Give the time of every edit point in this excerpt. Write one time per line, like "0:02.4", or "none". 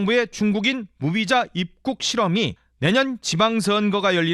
0:02.6